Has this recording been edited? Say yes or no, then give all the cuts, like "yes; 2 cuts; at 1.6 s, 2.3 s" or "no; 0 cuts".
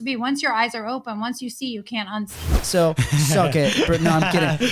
yes; 1 cut; at 2.6 s